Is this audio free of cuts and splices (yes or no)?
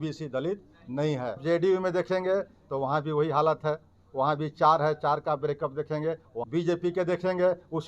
no